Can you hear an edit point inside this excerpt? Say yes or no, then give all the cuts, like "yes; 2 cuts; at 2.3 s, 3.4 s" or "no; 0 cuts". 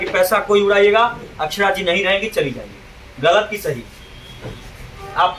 no; 0 cuts